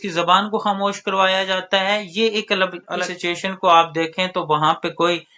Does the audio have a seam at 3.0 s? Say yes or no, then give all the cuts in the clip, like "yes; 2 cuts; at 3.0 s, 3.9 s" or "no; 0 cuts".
yes; 1 cut; at 3.0 s